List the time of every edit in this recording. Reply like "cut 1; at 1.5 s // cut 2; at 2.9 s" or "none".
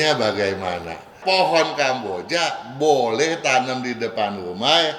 cut 1; at 1.1 s